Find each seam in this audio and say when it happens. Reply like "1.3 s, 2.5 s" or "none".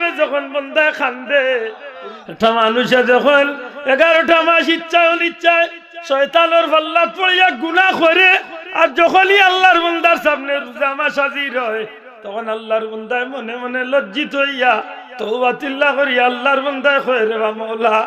1.9 s